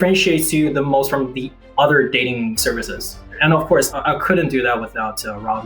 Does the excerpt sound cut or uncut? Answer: cut